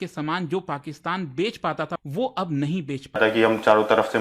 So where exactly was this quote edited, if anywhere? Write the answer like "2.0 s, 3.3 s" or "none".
2.0 s, 3.2 s